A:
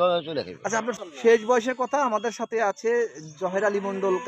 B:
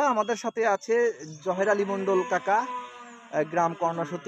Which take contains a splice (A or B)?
A